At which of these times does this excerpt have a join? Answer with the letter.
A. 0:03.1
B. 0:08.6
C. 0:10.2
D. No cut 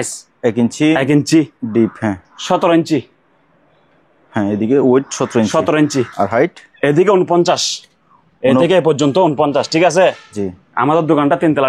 D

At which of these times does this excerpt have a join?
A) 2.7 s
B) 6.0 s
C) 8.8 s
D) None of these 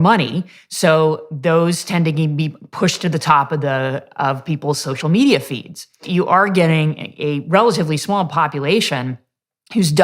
B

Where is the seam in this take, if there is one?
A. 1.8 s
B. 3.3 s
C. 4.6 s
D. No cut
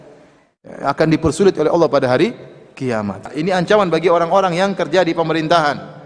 B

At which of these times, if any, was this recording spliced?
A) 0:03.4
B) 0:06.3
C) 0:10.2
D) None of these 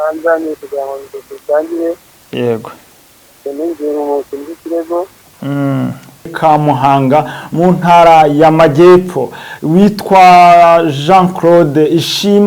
B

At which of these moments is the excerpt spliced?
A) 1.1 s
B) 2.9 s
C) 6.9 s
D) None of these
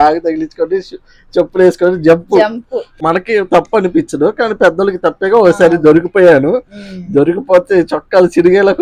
B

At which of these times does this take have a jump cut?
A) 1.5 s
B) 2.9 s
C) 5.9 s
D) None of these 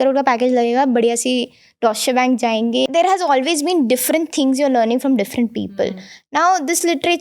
B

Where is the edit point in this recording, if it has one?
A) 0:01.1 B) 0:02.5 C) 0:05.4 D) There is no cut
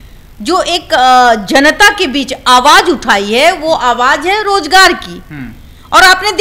D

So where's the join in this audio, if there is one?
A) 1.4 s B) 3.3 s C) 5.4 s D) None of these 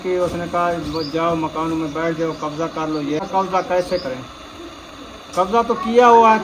B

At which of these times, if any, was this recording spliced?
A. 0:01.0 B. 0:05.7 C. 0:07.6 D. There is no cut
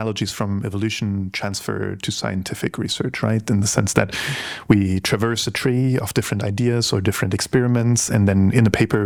D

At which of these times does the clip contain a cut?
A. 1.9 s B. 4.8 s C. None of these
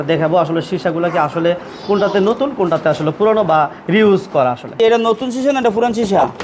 B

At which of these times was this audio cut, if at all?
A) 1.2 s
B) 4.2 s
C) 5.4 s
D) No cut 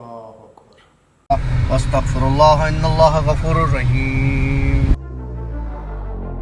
A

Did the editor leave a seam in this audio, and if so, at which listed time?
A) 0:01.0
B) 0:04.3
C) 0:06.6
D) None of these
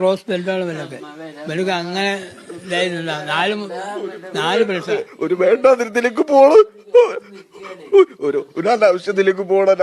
D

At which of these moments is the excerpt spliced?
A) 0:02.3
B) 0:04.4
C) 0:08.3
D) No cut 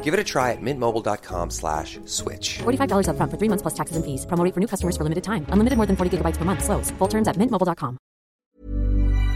C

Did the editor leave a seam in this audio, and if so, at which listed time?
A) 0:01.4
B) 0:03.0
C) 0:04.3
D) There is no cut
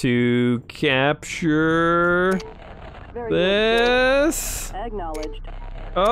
C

